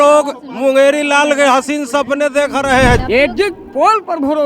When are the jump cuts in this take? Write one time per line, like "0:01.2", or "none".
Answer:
0:03.0